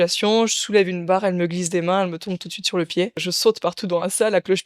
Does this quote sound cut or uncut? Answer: cut